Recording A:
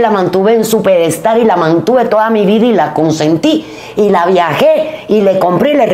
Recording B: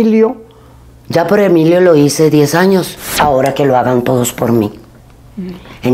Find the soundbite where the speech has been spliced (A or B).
B